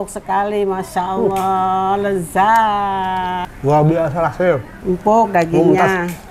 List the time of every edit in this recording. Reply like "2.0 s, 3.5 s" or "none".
3.5 s, 4.7 s